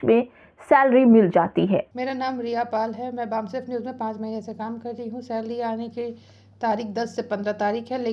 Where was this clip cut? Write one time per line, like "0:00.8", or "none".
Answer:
0:01.9